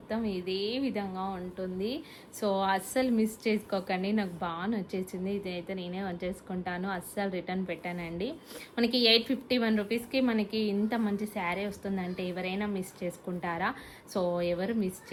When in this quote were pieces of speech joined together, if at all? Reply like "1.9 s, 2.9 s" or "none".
none